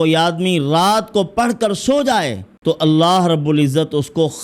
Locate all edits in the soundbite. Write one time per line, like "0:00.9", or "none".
0:02.4